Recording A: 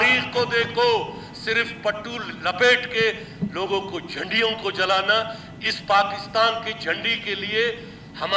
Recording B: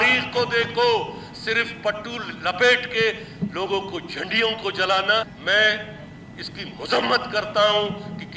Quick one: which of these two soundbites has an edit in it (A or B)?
B